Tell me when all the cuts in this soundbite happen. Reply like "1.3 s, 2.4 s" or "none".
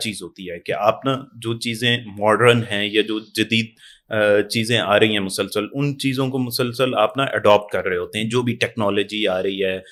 none